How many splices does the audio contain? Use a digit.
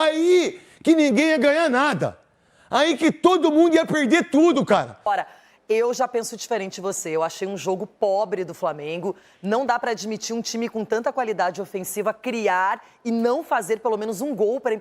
1